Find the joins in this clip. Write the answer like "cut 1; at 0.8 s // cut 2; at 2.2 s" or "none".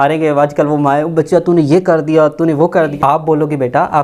cut 1; at 2.8 s